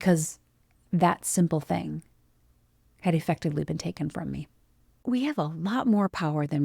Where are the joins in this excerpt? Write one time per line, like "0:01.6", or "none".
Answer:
0:05.0